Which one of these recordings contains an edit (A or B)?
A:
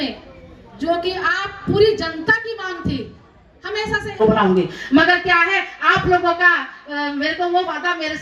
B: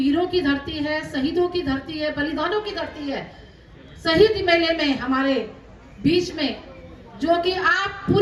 A